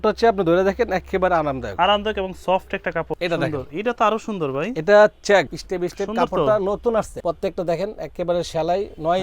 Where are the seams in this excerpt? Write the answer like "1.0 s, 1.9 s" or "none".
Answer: 3.1 s, 5.6 s, 7.1 s